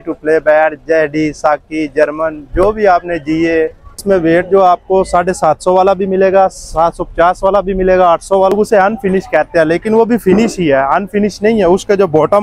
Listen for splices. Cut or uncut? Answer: cut